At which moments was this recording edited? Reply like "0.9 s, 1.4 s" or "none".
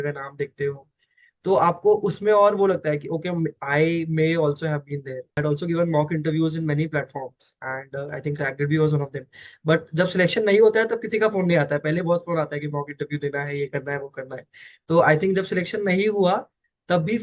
5.3 s